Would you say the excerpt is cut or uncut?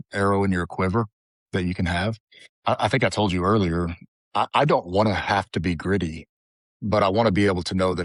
uncut